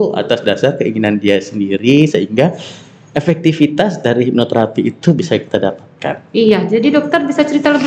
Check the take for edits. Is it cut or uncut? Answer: uncut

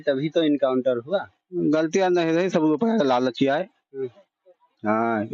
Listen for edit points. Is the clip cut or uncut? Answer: uncut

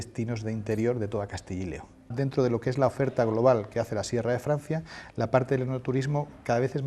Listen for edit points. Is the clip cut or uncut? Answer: cut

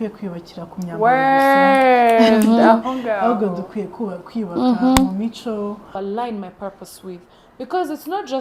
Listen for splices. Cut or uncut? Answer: cut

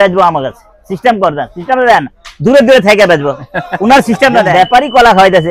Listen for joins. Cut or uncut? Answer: cut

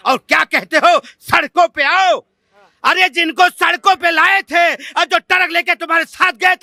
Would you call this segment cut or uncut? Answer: uncut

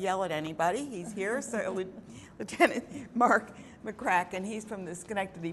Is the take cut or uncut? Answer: cut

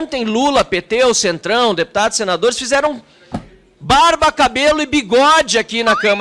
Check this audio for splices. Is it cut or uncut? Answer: uncut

